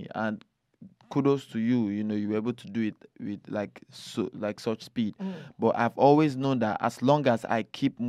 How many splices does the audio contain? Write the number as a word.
zero